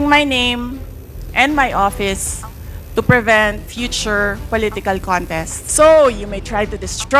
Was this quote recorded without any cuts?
no; 1 cut; at 5.6 s

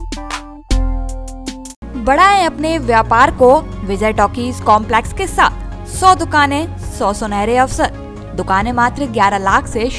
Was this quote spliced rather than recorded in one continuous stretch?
no; 0 cuts

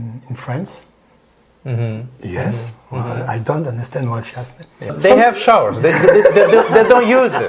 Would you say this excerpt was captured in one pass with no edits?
no; 1 cut; at 4.9 s

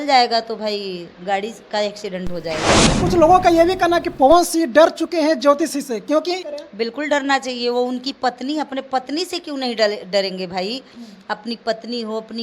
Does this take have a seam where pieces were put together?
yes; 2 cuts; at 2.9 s, 6.5 s

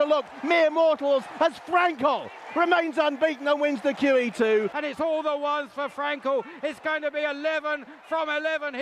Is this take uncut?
no; 1 cut; at 4.7 s

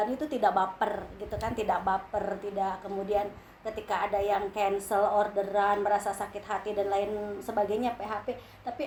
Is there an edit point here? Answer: no; 0 cuts

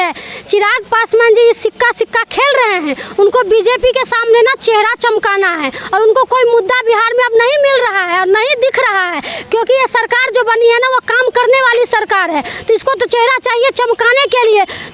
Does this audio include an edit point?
no; 0 cuts

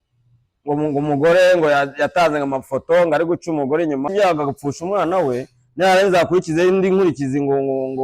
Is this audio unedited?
no; 1 cut; at 4.1 s

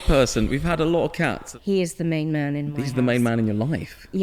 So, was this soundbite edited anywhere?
yes; 1 cut; at 1.5 s

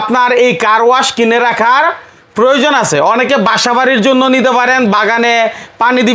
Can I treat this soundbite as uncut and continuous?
yes; 0 cuts

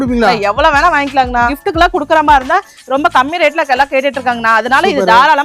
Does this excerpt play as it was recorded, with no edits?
no; 1 cut; at 1.5 s

